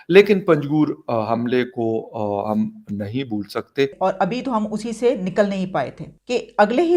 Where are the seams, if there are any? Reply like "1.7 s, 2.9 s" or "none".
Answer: 3.9 s